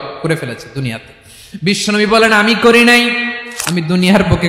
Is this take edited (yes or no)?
yes